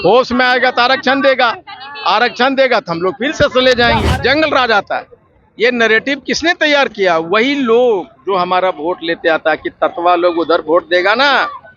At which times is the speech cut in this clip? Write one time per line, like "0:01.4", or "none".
0:04.1